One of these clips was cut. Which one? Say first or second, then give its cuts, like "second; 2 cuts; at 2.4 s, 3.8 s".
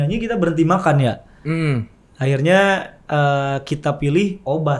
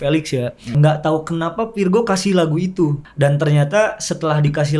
second; 2 cuts; at 0.8 s, 3.0 s